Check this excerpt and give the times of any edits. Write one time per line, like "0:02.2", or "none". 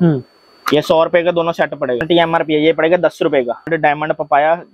0:02.0
0:03.7